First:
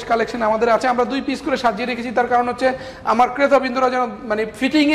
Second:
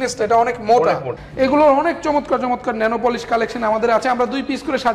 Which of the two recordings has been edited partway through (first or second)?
second